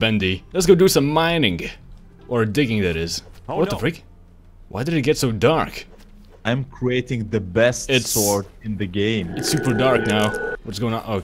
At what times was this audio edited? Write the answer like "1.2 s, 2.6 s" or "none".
none